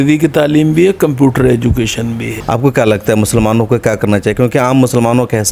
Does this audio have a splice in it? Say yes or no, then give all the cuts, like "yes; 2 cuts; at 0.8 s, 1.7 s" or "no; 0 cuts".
yes; 1 cut; at 2.3 s